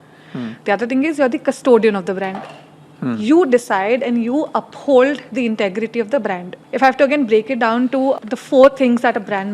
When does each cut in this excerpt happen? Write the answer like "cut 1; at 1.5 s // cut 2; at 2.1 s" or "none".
cut 1; at 6.5 s // cut 2; at 8.2 s